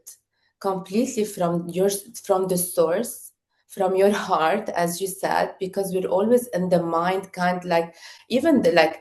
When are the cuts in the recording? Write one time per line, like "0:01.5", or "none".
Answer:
none